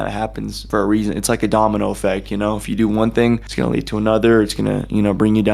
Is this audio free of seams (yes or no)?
yes